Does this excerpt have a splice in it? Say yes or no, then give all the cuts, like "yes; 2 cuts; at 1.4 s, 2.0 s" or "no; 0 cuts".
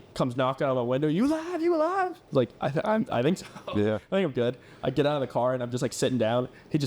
no; 0 cuts